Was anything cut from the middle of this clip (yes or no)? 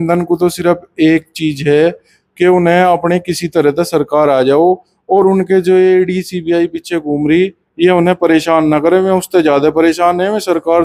no